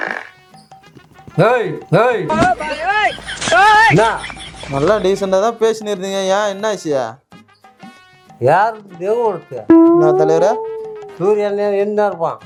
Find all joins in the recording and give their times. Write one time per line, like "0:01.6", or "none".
none